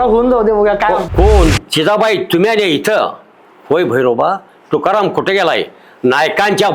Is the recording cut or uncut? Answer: cut